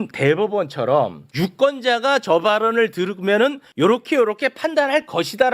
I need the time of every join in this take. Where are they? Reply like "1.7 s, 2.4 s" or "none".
1.2 s, 3.6 s